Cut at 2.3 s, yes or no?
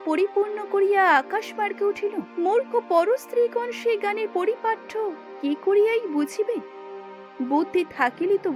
yes